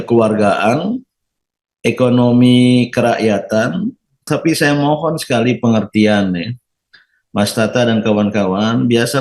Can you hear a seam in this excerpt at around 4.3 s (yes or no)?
yes